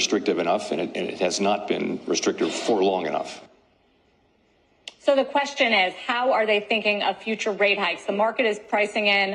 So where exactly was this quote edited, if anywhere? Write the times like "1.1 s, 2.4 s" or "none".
0.9 s